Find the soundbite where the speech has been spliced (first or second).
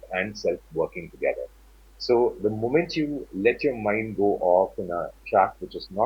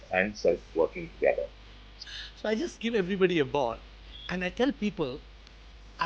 second